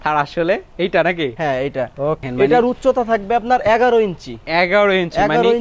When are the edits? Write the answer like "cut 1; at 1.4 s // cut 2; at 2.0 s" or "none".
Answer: cut 1; at 2.2 s

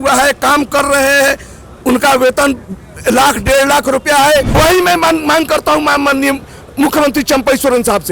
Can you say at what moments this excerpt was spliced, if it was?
cut 1; at 4.5 s

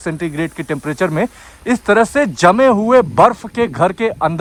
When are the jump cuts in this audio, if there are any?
none

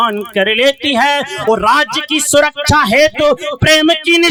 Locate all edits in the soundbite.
none

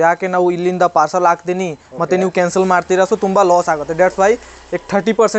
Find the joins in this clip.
none

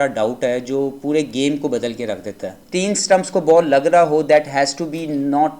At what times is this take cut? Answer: cut 1; at 2.6 s

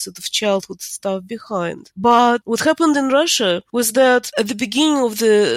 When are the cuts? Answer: cut 1; at 2.4 s // cut 2; at 3.6 s // cut 3; at 4.3 s

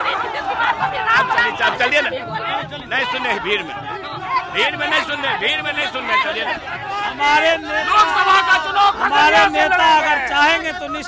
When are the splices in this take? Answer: cut 1; at 7.1 s

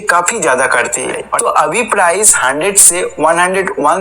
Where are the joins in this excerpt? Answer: cut 1; at 1.3 s

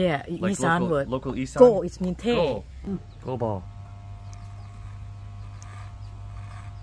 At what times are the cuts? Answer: cut 1; at 2.9 s

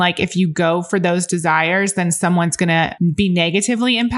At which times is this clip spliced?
cut 1; at 2.9 s

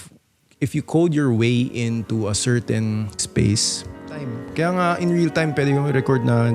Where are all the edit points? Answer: cut 1; at 4.4 s

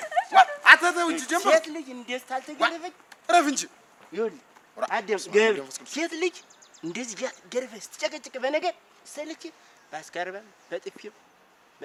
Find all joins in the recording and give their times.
none

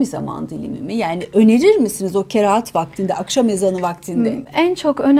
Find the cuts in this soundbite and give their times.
none

